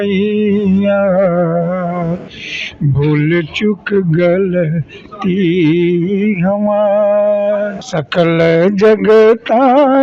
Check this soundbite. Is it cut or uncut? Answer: cut